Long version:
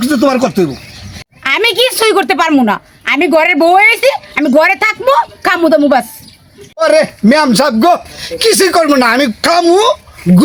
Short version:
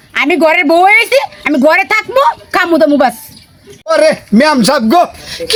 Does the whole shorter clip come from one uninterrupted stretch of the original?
yes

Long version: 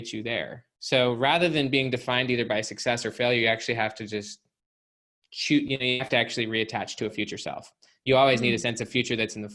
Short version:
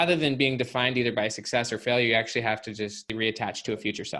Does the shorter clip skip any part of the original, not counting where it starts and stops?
yes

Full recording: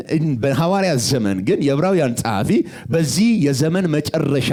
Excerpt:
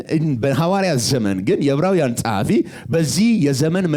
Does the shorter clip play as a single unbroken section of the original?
yes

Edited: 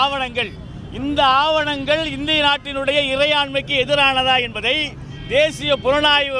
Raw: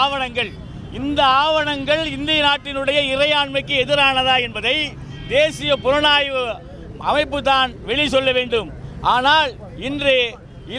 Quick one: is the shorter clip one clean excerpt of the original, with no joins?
yes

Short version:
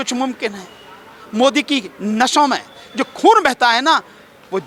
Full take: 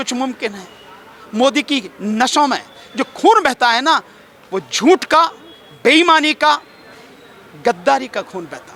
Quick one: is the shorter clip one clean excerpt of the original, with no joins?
yes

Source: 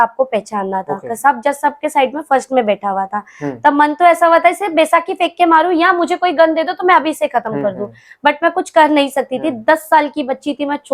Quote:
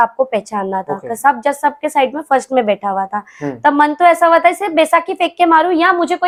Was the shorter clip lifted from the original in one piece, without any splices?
yes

